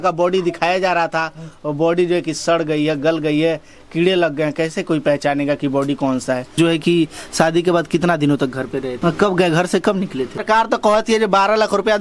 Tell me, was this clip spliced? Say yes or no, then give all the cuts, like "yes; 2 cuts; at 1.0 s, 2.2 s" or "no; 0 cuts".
yes; 3 cuts; at 6.5 s, 8.9 s, 10.4 s